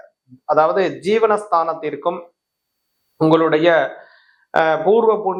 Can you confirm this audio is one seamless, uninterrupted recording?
yes; 0 cuts

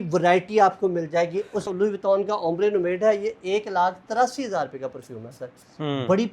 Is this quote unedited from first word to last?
no; 1 cut; at 1.7 s

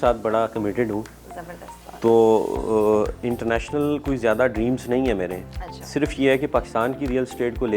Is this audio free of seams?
yes; 0 cuts

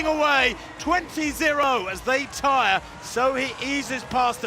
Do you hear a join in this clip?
yes; 1 cut; at 1.6 s

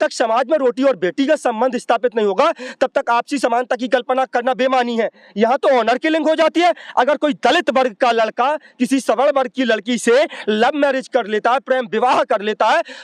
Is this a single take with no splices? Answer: yes; 0 cuts

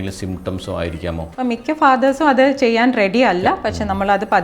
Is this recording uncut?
no; 1 cut; at 1.2 s

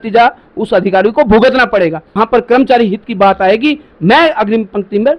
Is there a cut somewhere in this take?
yes; 1 cut; at 2.0 s

